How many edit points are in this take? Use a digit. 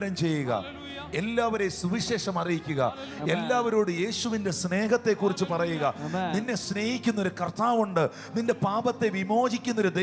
0